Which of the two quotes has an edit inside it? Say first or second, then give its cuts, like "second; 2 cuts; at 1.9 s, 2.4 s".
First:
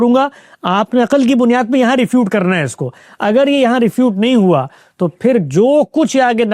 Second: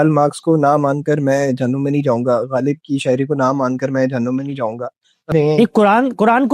second; 1 cut; at 5.3 s